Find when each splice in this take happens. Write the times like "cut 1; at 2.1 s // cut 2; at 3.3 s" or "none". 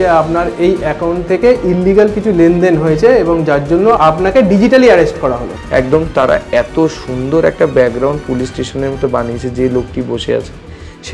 cut 1; at 4.0 s // cut 2; at 5.5 s